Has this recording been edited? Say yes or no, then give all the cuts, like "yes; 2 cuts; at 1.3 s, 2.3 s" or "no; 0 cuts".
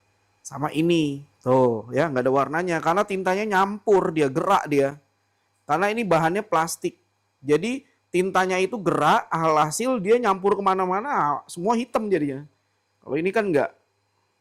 no; 0 cuts